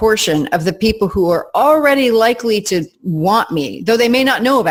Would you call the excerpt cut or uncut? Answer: uncut